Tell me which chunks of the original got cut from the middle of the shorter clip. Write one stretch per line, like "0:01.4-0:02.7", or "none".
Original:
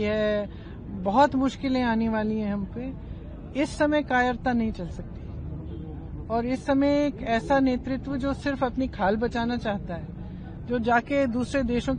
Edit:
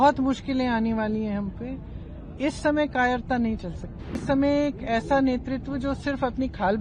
0:05.3-0:06.6